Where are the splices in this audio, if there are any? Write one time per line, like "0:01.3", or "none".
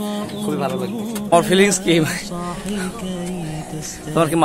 0:01.3